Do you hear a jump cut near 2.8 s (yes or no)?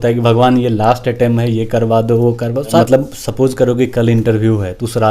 yes